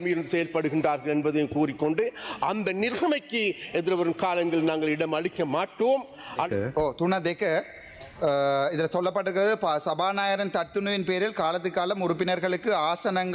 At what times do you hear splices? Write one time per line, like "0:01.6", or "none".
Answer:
0:06.5